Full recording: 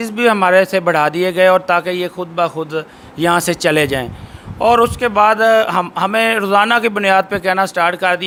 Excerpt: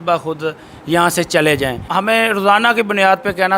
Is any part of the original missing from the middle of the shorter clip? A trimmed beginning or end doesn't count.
yes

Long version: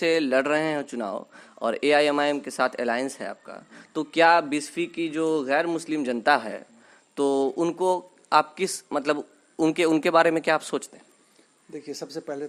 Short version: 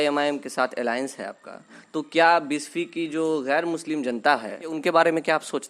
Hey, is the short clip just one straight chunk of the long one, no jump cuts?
no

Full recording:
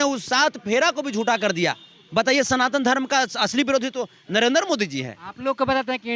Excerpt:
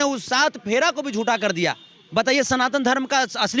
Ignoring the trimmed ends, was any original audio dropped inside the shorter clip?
no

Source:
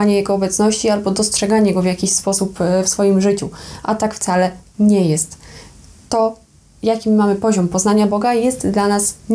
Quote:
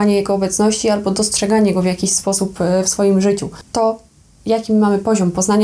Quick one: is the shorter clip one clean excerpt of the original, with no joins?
no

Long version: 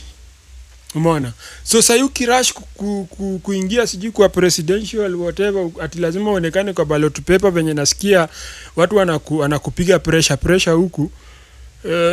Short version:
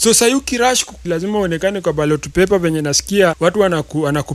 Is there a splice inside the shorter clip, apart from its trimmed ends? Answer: yes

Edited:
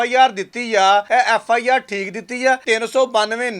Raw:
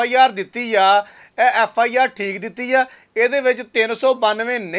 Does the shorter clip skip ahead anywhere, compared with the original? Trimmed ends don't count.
yes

